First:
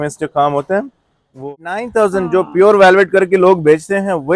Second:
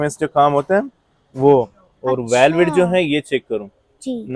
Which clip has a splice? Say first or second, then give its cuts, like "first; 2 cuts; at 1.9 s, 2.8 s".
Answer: first; 1 cut; at 1.5 s